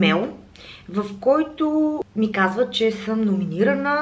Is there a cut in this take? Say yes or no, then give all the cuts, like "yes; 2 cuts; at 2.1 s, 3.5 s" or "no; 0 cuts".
no; 0 cuts